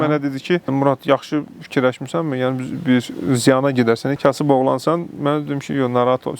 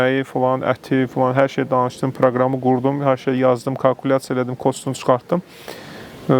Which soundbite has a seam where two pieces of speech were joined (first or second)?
first